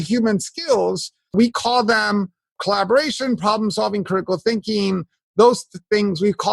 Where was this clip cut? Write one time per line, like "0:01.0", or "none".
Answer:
0:01.3
0:02.6